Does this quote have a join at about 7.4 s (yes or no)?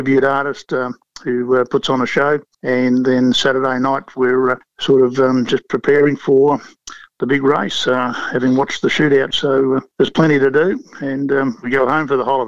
no